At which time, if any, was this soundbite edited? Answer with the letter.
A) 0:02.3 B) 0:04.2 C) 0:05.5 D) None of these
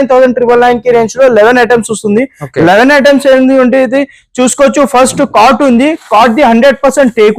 D